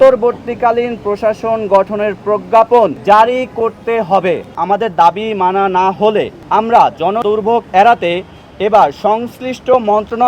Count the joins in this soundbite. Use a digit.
4